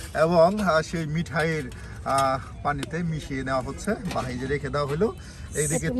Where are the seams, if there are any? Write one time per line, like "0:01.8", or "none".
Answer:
none